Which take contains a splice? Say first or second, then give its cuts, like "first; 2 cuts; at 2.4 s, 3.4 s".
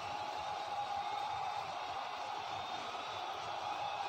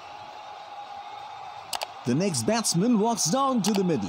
second; 1 cut; at 1.8 s